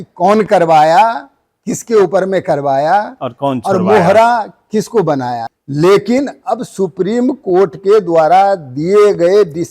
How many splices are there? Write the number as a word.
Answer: one